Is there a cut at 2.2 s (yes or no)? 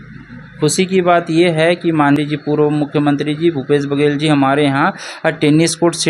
yes